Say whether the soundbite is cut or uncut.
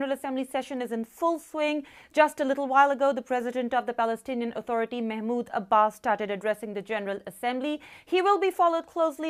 uncut